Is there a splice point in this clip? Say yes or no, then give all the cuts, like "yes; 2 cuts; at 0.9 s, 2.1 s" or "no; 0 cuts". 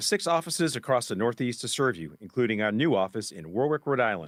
no; 0 cuts